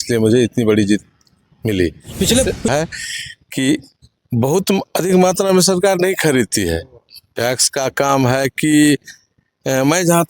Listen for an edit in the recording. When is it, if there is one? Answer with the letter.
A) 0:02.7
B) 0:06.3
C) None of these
A